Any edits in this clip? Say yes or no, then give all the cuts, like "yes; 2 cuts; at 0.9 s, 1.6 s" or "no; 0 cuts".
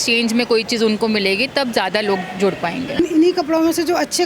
yes; 1 cut; at 3.0 s